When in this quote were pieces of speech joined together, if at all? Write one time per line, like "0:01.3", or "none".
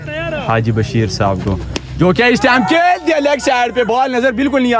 none